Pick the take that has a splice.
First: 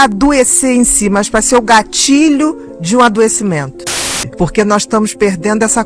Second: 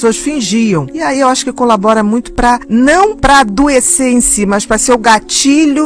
first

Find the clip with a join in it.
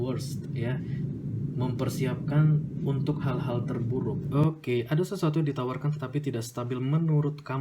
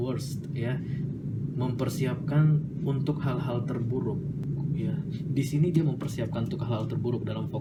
first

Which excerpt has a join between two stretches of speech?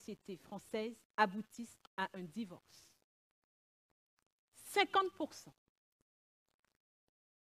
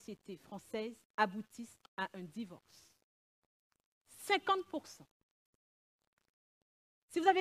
second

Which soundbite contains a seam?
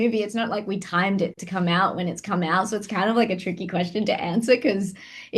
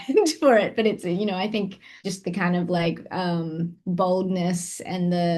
second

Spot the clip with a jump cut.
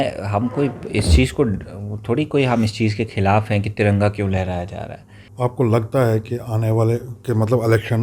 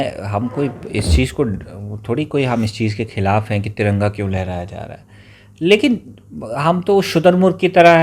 first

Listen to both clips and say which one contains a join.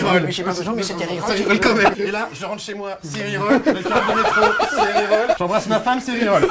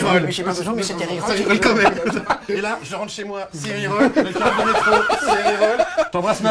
first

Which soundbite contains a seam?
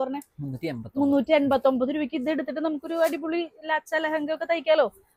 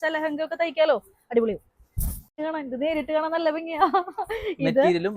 second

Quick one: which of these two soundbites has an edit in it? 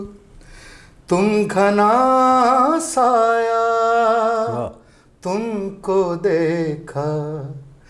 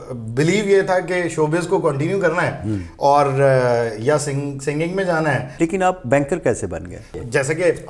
second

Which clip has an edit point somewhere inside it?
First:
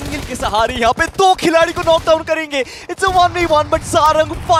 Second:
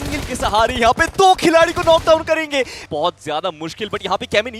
second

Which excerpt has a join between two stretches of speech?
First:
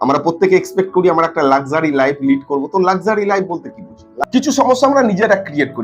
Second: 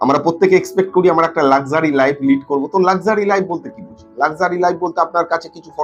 first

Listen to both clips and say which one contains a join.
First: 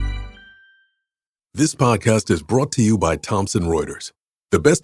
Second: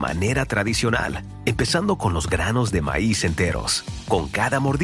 first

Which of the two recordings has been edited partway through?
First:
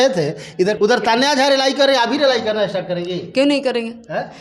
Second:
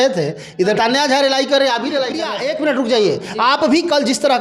second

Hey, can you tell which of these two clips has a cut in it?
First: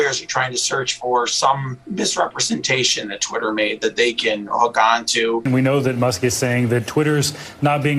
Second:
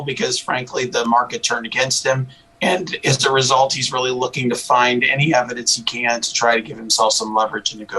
first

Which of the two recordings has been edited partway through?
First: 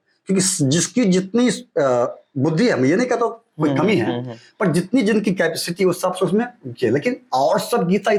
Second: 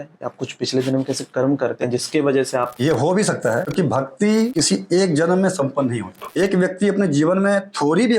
second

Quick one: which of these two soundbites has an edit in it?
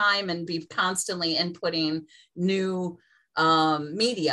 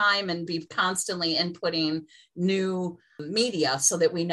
second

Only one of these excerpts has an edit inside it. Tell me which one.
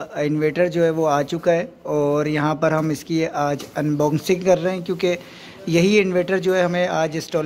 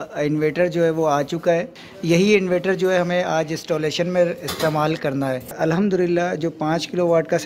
second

